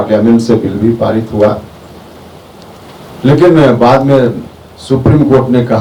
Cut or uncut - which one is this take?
uncut